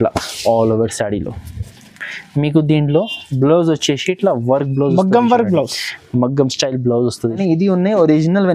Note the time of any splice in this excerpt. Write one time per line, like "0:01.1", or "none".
0:07.4